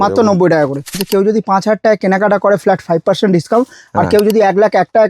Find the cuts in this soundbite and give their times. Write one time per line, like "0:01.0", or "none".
0:01.0